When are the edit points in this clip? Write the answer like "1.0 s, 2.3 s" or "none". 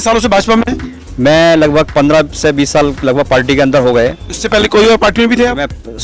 none